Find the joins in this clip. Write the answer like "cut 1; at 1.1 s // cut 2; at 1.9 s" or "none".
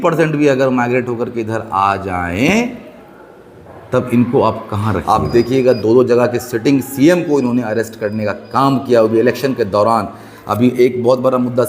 cut 1; at 5.0 s